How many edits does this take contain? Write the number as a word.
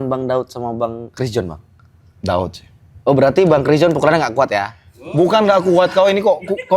one